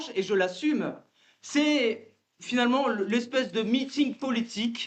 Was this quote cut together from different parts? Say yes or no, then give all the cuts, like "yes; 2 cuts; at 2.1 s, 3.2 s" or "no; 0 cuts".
no; 0 cuts